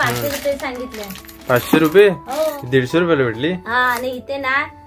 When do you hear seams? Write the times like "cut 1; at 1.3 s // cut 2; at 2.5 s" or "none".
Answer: cut 1; at 2.6 s